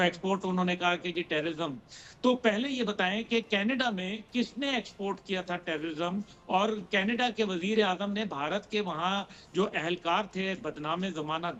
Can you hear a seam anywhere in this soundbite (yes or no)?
no